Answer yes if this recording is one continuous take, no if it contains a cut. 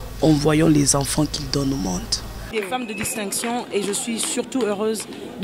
no